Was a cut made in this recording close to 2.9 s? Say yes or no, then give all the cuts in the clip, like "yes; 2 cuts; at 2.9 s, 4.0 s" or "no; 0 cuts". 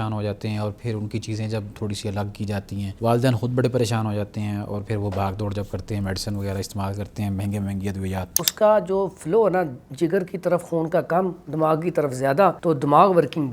yes; 3 cuts; at 2.9 s, 8.5 s, 12.6 s